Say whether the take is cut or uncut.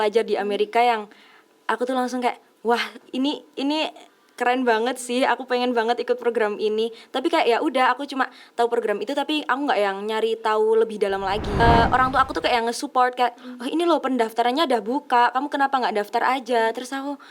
cut